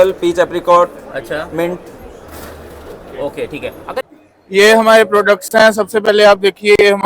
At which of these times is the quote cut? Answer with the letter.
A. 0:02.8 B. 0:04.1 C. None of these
B